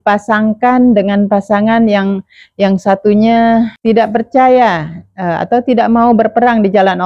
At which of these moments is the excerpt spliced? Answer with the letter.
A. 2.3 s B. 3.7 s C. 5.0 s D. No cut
B